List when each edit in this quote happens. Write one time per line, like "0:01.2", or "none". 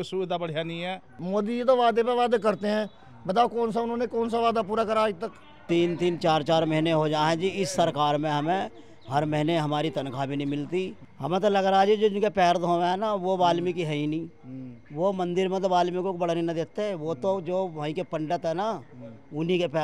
0:01.2
0:05.6
0:11.0